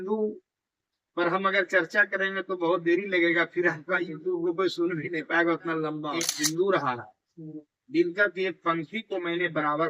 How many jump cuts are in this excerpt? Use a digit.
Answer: 1